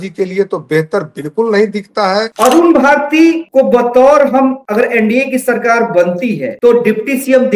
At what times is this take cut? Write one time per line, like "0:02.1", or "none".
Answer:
0:02.3
0:03.4
0:04.6
0:06.5